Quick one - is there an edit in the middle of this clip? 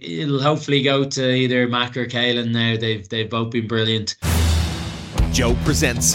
yes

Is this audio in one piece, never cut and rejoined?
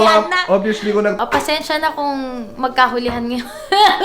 no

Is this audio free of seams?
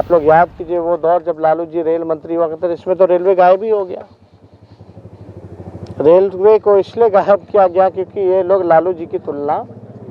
yes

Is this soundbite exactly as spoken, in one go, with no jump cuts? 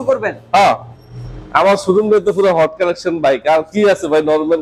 yes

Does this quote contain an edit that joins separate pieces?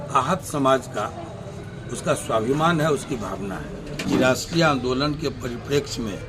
yes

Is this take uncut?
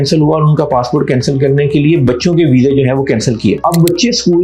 yes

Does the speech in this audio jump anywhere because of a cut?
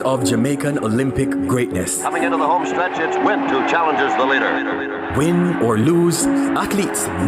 no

